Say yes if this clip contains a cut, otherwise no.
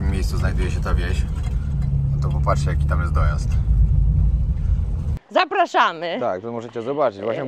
yes